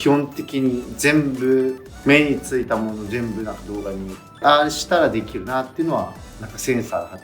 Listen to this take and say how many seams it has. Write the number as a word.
two